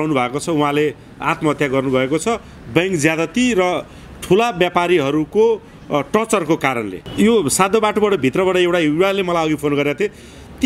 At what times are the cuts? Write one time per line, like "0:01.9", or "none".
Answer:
0:07.0